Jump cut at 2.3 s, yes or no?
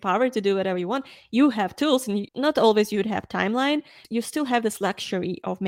yes